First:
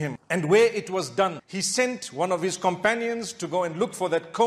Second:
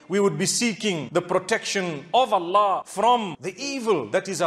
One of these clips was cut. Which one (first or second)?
second